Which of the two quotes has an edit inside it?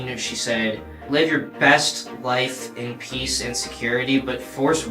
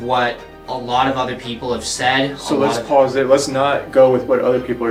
first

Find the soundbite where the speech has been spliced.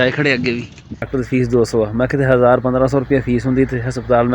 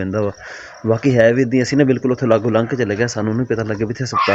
first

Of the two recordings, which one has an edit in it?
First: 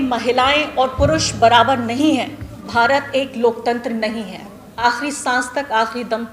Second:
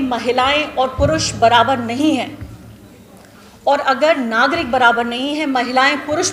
first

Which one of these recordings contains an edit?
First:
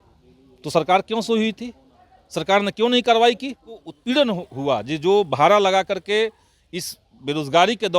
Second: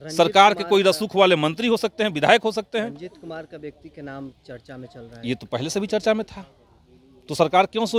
first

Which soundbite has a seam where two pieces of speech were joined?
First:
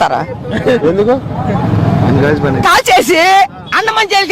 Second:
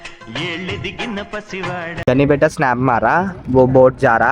second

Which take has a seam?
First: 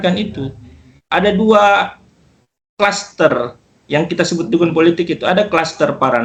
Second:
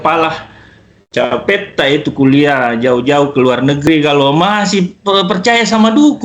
second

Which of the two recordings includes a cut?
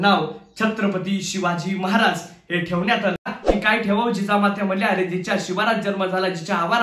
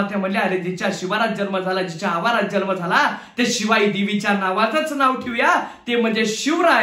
first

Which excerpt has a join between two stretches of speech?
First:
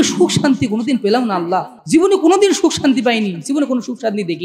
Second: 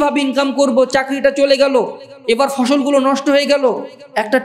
first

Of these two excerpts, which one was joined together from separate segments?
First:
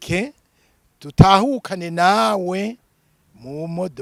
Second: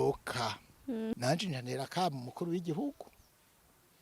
second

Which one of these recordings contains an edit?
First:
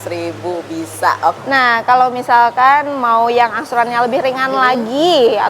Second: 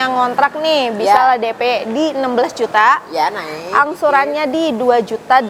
first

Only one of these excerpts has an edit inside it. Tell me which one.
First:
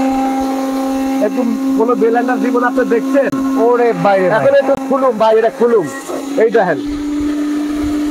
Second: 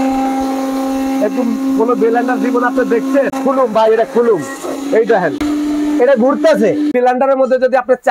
second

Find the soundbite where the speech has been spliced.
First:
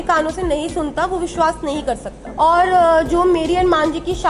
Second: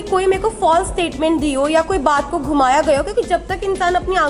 first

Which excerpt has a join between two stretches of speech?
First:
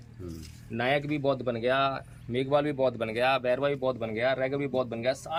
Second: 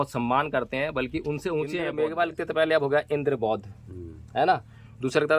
second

